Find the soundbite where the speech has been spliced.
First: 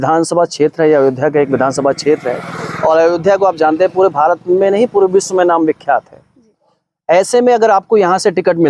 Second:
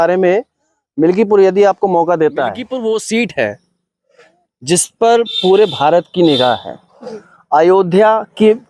second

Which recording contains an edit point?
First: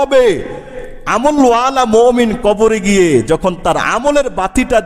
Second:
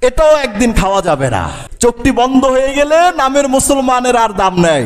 second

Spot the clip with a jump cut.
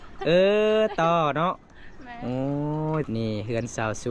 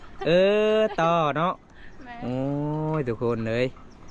first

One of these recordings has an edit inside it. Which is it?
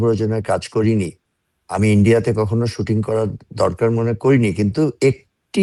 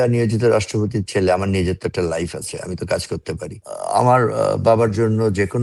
second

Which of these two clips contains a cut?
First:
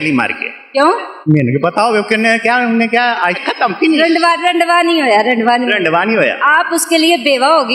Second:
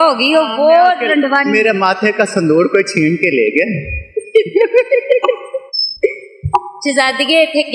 first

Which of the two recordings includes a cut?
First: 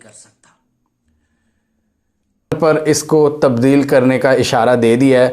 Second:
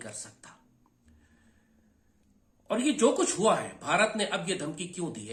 first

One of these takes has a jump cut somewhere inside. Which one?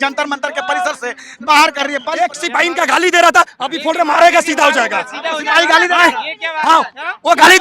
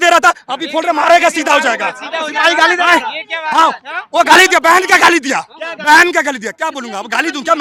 first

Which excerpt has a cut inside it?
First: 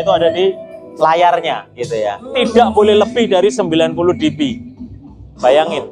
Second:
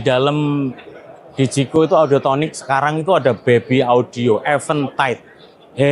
first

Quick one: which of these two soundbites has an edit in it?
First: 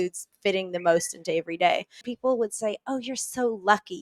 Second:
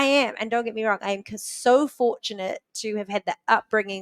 first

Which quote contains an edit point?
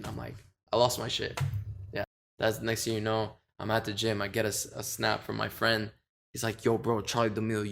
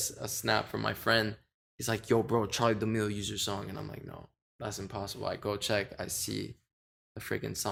first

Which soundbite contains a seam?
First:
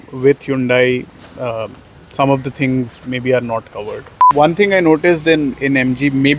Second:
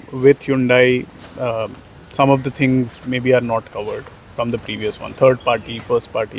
first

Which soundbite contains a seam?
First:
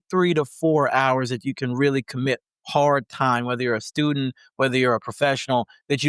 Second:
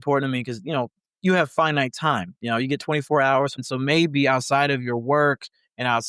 second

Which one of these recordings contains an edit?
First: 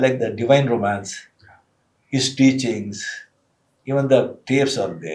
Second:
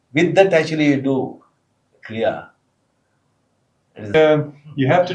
second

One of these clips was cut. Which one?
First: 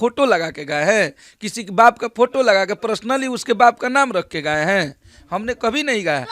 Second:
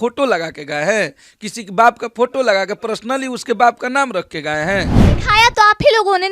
second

